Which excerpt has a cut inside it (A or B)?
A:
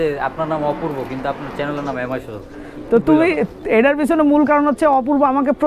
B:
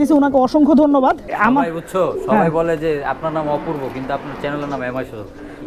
B